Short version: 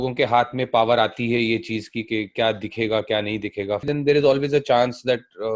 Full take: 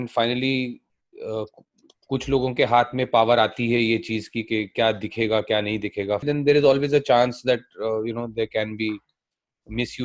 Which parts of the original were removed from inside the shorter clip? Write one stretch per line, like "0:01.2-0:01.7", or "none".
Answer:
none